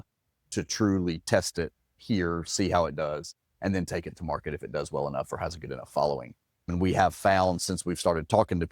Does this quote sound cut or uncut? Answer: cut